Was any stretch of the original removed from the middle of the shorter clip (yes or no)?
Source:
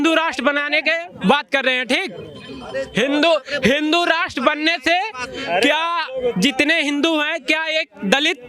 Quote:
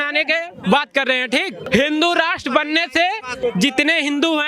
yes